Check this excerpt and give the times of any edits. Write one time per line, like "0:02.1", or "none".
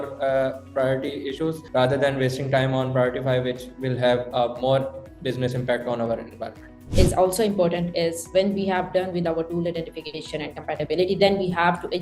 0:01.6
0:06.8